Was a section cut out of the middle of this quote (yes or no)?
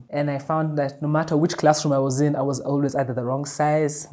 no